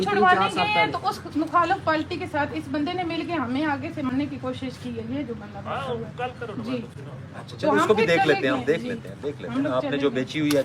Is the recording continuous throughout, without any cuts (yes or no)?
yes